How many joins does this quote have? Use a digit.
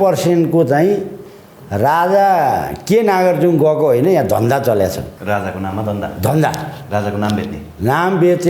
1